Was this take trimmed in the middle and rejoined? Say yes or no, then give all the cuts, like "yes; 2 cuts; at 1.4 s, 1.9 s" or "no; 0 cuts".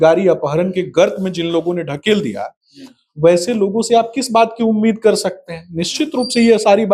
no; 0 cuts